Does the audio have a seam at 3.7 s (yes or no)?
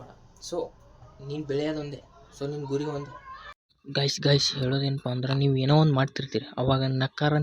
yes